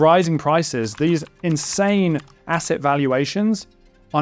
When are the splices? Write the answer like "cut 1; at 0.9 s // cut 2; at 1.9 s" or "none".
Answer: cut 1; at 1.4 s